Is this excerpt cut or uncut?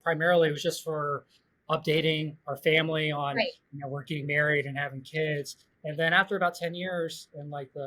uncut